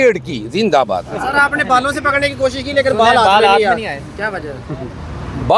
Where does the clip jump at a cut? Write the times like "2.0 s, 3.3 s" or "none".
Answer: 1.2 s